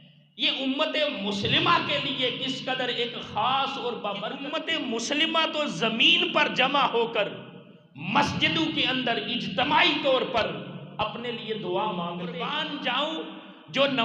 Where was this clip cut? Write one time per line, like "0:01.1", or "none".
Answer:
0:04.6
0:12.6